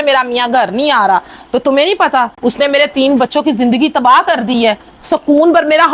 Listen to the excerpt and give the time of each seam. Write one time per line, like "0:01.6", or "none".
0:02.3